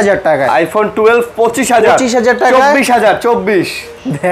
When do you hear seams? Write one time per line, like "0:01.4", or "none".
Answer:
none